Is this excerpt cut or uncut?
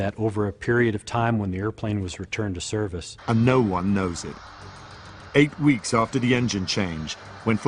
uncut